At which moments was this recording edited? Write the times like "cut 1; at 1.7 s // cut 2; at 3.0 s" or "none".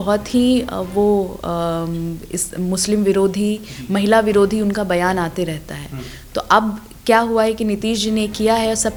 none